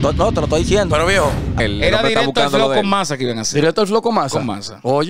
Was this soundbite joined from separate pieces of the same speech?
yes; 1 cut; at 1.6 s

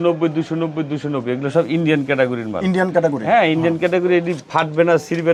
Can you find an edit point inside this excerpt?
no; 0 cuts

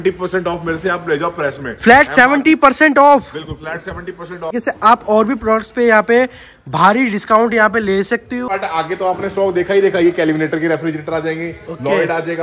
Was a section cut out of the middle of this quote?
yes; 2 cuts; at 4.5 s, 8.5 s

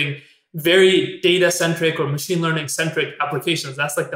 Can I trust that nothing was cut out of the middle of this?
yes; 0 cuts

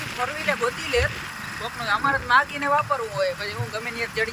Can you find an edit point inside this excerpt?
no; 0 cuts

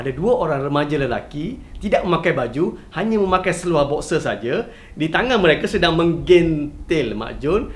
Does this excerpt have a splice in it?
no; 0 cuts

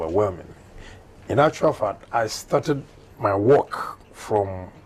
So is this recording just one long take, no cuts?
no; 1 cut; at 1.0 s

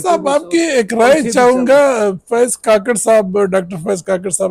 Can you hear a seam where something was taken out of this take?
no; 0 cuts

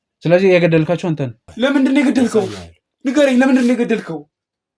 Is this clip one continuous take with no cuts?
no; 1 cut; at 1.4 s

